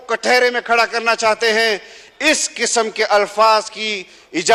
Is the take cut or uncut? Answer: uncut